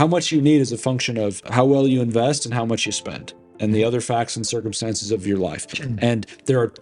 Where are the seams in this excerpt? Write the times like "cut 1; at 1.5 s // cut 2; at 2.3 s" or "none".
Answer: none